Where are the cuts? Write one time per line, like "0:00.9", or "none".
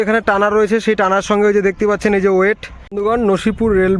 0:02.8